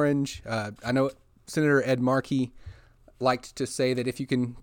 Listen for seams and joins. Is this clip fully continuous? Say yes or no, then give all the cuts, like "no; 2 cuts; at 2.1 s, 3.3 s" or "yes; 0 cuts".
yes; 0 cuts